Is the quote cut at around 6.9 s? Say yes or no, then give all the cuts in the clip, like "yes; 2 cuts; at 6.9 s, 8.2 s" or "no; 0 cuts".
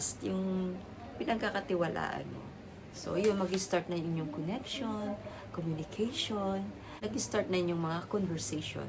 yes; 1 cut; at 6.9 s